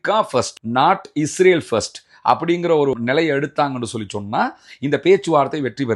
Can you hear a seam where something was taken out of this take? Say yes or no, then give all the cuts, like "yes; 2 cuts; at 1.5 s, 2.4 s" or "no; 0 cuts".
no; 0 cuts